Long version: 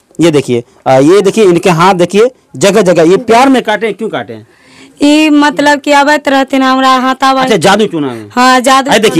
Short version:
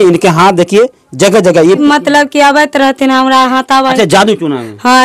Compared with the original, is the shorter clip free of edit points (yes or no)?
no